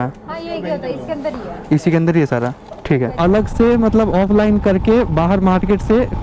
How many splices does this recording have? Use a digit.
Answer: 1